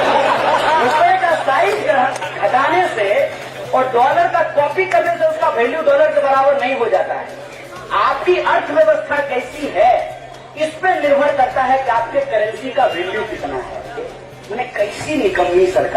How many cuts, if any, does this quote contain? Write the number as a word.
one